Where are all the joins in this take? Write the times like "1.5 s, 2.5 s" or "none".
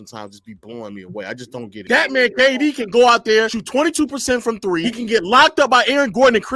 1.6 s